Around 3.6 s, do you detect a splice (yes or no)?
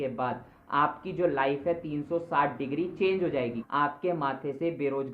yes